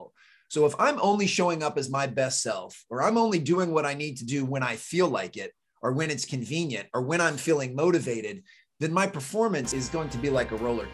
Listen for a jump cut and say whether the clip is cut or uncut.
cut